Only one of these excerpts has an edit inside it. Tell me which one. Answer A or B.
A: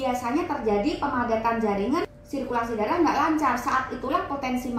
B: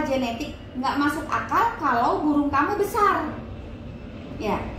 A